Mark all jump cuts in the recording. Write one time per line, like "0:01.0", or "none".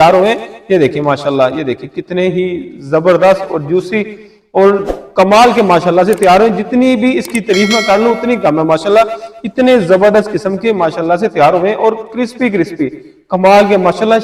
none